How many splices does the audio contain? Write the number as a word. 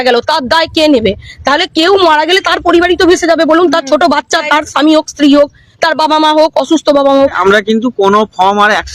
one